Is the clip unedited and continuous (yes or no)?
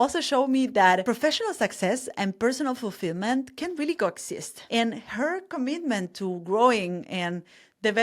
no